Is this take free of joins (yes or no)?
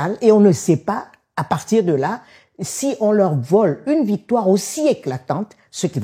yes